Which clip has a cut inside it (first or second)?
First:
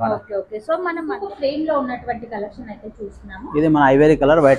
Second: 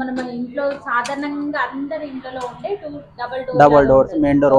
first